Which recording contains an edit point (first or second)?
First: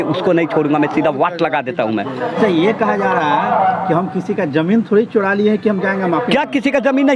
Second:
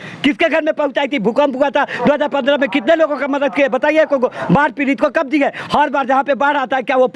first